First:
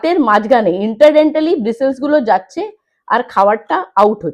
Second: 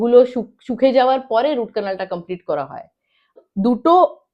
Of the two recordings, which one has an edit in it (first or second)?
second